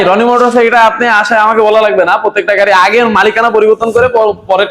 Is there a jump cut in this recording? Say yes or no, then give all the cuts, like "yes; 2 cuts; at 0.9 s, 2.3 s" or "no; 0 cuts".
no; 0 cuts